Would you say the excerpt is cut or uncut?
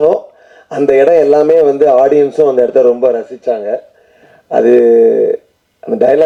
uncut